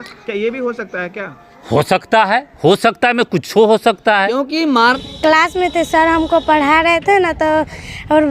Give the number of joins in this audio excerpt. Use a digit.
1